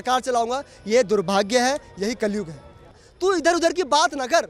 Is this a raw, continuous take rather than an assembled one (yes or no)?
no